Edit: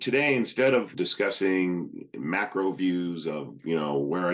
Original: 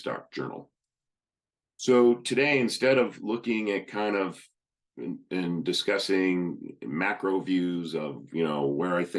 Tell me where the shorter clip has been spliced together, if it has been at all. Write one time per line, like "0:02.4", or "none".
0:00.9

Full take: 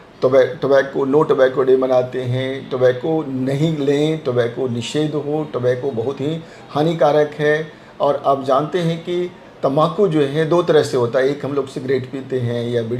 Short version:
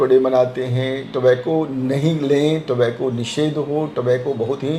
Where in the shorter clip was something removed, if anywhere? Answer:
none

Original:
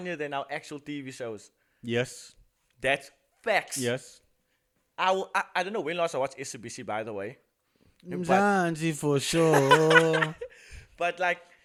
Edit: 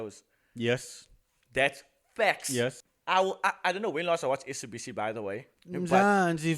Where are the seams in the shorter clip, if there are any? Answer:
0:02.9
0:05.5

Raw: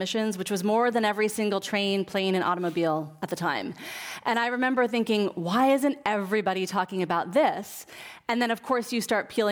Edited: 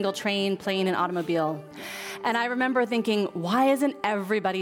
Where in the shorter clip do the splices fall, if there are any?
0:01.7

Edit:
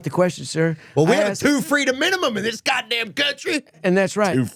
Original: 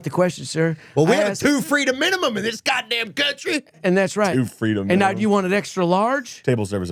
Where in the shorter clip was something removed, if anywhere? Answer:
none

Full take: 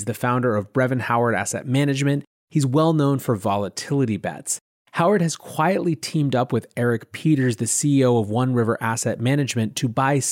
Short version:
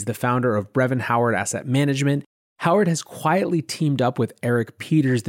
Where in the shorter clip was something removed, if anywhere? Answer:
0:02.4

